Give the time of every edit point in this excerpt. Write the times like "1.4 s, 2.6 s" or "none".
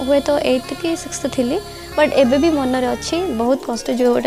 none

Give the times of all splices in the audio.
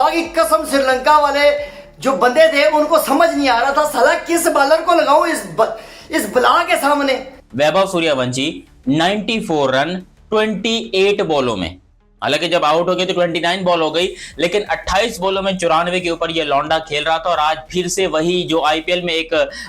7.3 s

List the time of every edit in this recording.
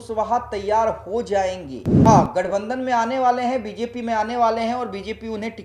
2.1 s

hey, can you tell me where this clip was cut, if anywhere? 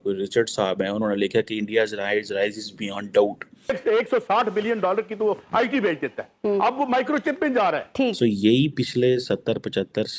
3.8 s, 8.2 s

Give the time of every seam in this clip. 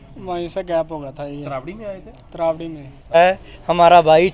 3.1 s

